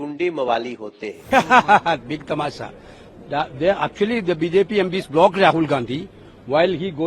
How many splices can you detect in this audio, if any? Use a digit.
1